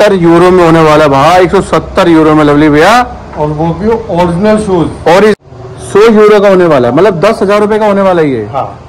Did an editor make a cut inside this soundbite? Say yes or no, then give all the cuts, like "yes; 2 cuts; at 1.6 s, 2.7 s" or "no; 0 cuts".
yes; 1 cut; at 5.4 s